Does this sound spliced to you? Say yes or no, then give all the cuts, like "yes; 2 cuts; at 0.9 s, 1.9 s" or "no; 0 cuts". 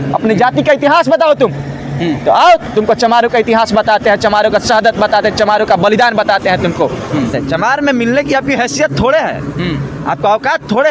yes; 1 cut; at 7.3 s